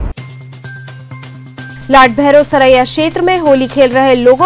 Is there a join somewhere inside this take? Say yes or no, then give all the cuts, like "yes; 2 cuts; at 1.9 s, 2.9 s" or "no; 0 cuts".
yes; 1 cut; at 1.5 s